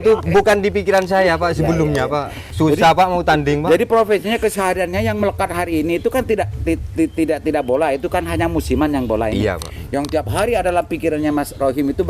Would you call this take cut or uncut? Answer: cut